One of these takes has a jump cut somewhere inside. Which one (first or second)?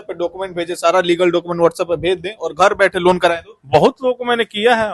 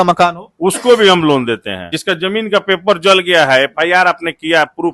second